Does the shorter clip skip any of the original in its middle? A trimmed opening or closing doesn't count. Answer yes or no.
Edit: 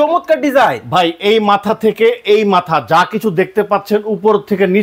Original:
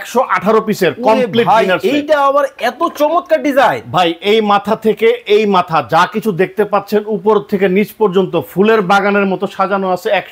no